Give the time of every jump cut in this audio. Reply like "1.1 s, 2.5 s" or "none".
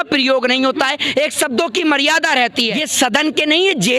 2.8 s